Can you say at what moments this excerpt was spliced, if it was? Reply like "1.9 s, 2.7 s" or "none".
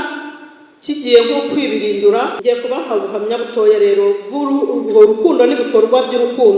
2.4 s